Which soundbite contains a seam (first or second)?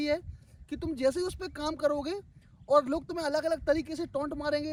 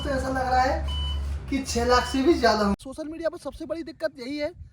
second